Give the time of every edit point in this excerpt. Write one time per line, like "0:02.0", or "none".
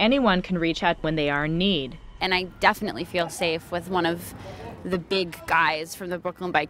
0:01.0
0:02.2